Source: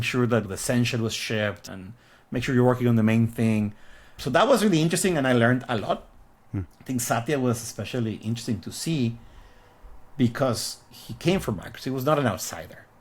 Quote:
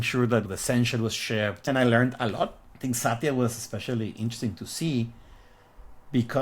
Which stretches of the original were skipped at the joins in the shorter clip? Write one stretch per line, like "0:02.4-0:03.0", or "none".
0:01.7-0:05.1
0:06.1-0:06.7